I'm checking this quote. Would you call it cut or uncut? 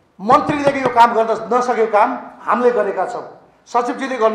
uncut